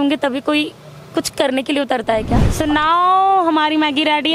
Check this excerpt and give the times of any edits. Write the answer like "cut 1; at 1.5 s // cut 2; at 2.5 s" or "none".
cut 1; at 2.4 s